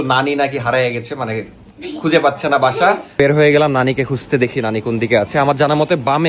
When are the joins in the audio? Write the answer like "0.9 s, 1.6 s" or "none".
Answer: 3.1 s